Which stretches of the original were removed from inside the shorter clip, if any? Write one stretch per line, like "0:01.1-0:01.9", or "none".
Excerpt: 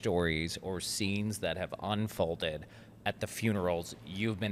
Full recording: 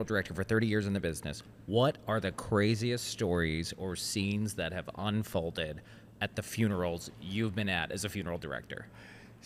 none